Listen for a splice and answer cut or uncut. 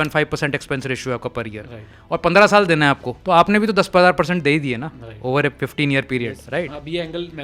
cut